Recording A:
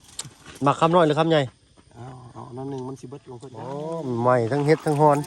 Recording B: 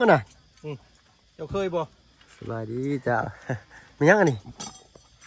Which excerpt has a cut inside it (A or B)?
A